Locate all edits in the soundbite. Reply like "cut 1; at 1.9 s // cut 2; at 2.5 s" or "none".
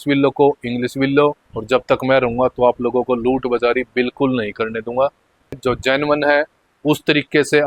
cut 1; at 1.5 s // cut 2; at 5.6 s